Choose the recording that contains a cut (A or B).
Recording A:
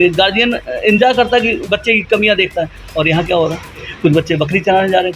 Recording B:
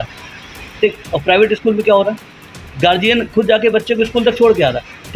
A